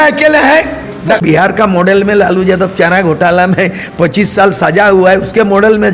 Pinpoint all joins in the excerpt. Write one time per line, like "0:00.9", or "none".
0:01.2